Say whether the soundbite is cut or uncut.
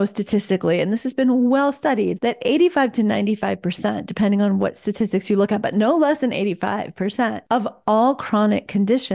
cut